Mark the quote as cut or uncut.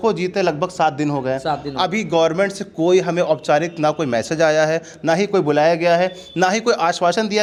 uncut